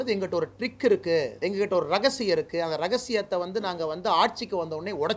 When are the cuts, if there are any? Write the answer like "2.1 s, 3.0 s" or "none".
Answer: 1.3 s